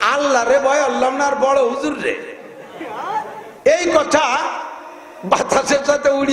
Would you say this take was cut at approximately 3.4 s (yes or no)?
yes